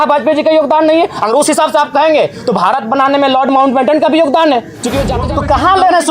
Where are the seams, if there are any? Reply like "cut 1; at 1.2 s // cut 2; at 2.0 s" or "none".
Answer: cut 1; at 5.1 s